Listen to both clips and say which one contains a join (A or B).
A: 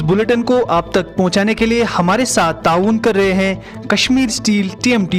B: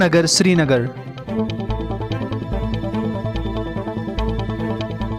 B